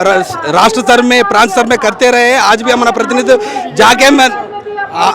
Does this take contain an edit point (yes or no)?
no